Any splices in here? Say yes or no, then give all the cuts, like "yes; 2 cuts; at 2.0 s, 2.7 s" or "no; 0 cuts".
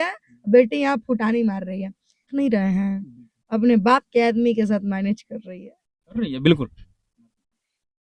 yes; 1 cut; at 2.3 s